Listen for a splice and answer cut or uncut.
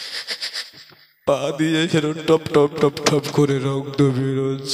uncut